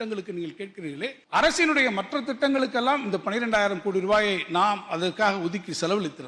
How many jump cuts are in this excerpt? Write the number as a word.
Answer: one